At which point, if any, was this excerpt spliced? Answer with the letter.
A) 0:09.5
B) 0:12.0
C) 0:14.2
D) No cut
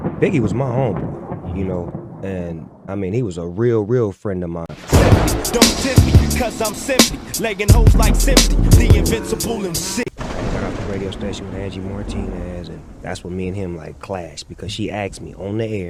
D